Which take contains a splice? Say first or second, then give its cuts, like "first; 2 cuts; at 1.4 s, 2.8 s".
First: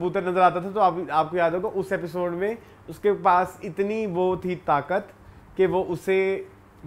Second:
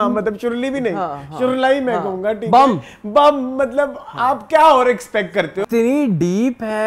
second; 1 cut; at 5.6 s